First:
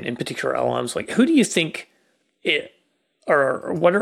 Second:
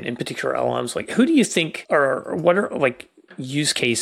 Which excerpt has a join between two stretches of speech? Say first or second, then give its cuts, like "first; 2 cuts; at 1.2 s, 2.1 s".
second; 1 cut; at 1.8 s